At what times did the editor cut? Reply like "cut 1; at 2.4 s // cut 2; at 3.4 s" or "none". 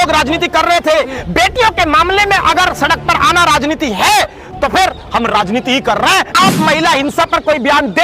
cut 1; at 6.3 s